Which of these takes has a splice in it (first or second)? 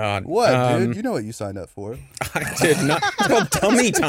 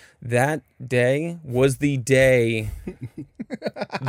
first